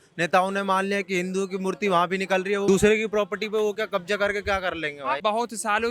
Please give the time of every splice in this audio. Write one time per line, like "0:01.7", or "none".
0:02.7
0:05.2